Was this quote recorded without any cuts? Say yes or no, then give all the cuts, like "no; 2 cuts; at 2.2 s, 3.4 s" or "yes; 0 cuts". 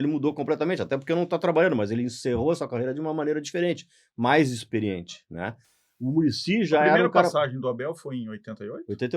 yes; 0 cuts